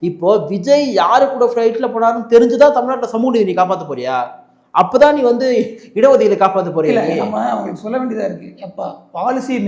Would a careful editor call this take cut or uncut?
uncut